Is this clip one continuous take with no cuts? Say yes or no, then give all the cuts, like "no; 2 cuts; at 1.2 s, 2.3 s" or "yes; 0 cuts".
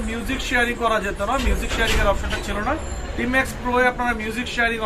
yes; 0 cuts